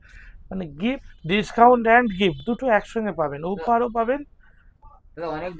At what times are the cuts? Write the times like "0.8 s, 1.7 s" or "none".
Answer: 1.1 s